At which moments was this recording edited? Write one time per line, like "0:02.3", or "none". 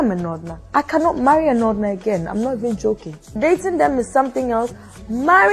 none